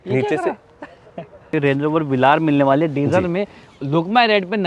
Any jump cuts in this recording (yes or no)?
yes